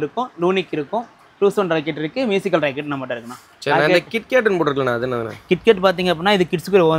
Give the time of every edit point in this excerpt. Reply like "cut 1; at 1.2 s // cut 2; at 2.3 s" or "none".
none